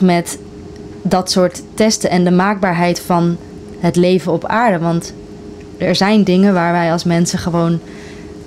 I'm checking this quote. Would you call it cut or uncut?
uncut